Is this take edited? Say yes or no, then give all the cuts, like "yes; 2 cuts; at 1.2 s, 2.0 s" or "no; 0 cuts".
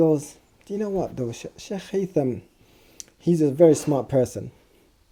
no; 0 cuts